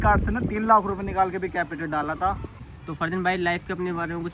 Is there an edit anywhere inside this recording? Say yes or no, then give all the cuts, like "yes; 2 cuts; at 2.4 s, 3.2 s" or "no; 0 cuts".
yes; 1 cut; at 2.6 s